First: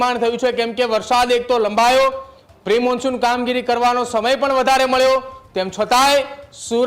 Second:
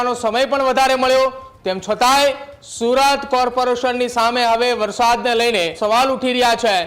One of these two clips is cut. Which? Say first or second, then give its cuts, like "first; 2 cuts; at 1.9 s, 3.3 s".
second; 1 cut; at 5.8 s